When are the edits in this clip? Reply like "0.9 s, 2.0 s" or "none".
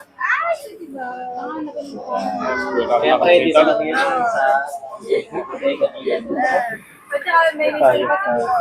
none